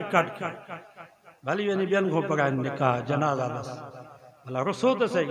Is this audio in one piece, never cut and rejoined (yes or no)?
yes